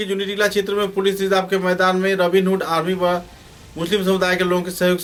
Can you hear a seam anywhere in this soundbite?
no; 0 cuts

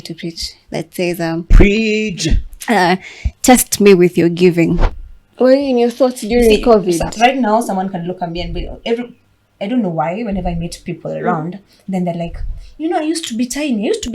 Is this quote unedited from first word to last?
no; 1 cut; at 4.8 s

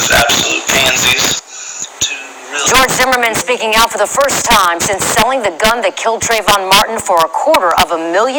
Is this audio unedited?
no; 1 cut; at 4.4 s

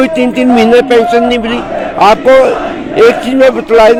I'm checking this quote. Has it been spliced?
no; 0 cuts

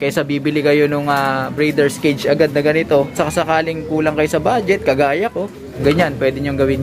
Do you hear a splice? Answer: yes; 2 cuts; at 3.1 s, 5.8 s

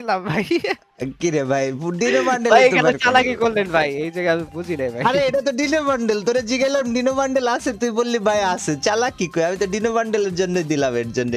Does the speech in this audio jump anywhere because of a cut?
no; 0 cuts

